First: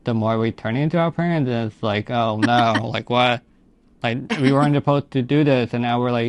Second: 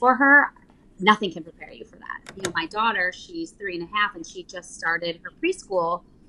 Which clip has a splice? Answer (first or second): second